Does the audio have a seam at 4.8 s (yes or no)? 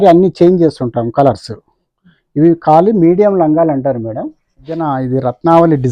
yes